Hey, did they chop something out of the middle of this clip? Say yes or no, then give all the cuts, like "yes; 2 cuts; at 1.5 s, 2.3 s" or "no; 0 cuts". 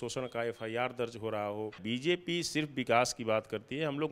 yes; 1 cut; at 1.8 s